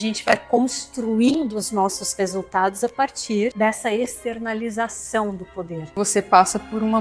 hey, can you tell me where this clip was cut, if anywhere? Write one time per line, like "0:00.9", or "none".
0:03.5
0:06.0